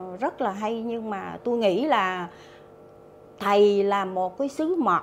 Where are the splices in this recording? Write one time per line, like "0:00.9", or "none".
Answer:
none